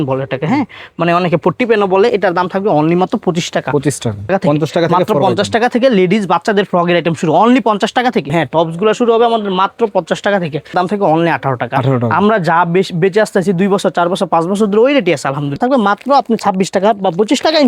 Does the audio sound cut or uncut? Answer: cut